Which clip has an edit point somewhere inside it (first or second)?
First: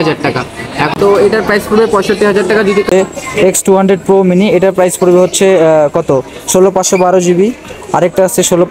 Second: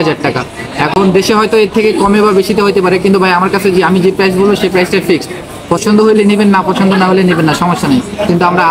first